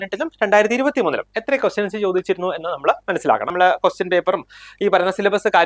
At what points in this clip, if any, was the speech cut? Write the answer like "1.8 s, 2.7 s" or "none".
3.5 s